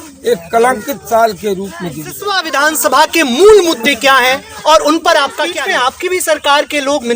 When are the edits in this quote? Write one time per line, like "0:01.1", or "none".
0:02.3
0:05.5